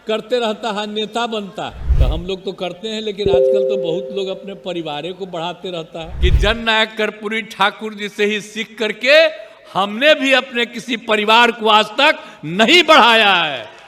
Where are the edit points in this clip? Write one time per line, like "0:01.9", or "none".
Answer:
0:01.8
0:06.0